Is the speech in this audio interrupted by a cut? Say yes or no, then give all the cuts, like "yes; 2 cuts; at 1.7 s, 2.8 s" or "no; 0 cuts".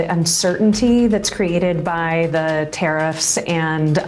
no; 0 cuts